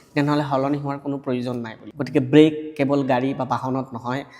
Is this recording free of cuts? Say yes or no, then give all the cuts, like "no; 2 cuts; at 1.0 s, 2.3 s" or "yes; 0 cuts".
no; 1 cut; at 1.8 s